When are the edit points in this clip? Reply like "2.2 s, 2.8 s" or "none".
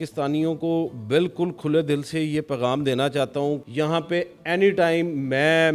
3.6 s